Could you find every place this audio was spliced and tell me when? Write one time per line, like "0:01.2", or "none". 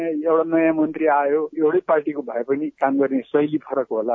0:01.5
0:02.8